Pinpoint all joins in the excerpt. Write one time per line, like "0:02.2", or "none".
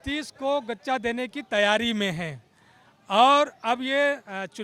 none